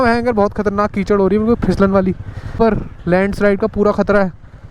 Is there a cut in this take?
yes; 1 cut; at 2.5 s

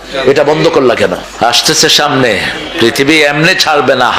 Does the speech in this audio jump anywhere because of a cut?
yes; 1 cut; at 1.2 s

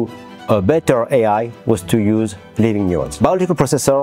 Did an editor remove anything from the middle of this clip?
yes; 1 cut; at 3.1 s

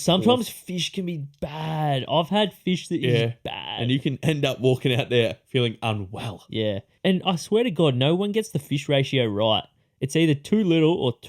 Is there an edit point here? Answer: yes; 1 cut; at 6.9 s

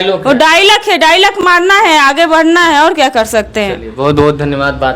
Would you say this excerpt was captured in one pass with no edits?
yes; 0 cuts

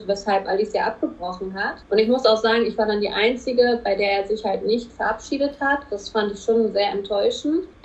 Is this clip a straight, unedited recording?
yes; 0 cuts

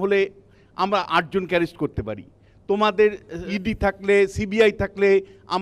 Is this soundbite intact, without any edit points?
yes; 0 cuts

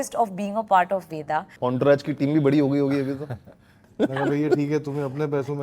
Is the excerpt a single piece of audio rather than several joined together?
no; 2 cuts; at 1.5 s, 3.9 s

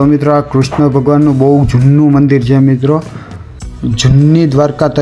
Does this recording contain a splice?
no; 0 cuts

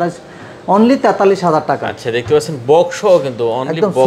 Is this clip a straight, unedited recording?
yes; 0 cuts

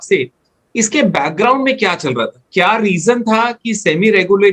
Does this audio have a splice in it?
no; 0 cuts

